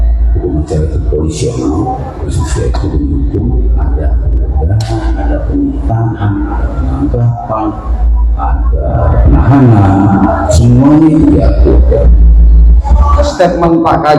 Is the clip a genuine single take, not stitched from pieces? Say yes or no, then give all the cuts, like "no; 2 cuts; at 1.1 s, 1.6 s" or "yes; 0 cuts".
no; 3 cuts; at 2.3 s, 9.1 s, 13.3 s